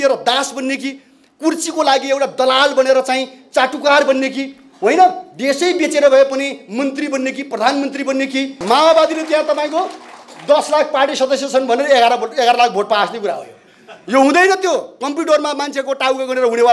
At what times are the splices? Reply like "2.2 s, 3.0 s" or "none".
8.6 s